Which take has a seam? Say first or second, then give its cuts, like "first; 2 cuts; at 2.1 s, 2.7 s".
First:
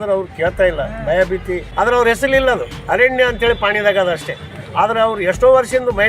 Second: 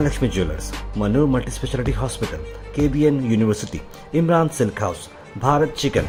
first; 1 cut; at 1.6 s